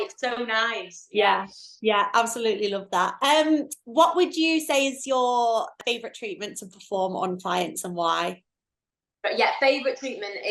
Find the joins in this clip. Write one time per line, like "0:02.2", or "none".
0:03.1
0:05.8